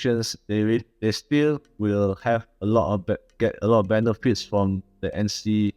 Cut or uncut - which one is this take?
uncut